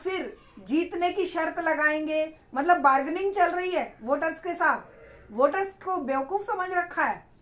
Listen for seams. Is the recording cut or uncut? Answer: uncut